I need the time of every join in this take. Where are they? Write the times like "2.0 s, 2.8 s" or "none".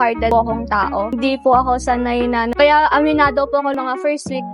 2.5 s